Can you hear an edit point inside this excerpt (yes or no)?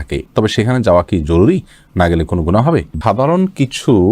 yes